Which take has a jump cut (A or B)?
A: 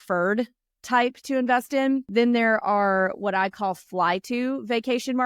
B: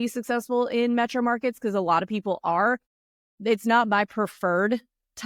A